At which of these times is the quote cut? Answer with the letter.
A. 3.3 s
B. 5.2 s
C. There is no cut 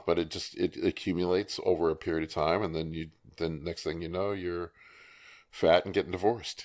C